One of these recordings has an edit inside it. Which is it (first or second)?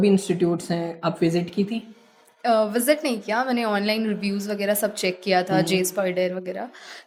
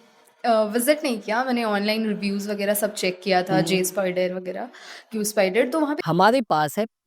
second